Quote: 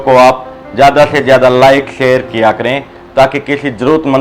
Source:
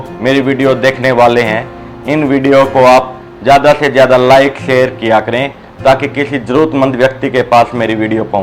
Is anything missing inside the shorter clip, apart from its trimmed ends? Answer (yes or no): no